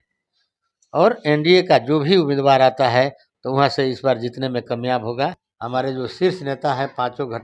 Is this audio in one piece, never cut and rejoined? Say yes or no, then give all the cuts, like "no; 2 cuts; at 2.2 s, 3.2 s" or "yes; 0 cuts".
no; 1 cut; at 5.5 s